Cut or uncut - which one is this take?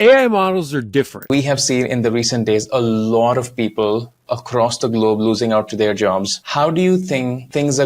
cut